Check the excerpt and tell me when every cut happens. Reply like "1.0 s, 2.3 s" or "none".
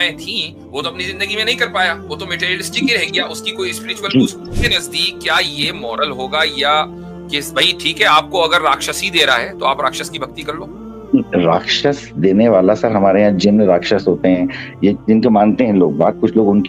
4.5 s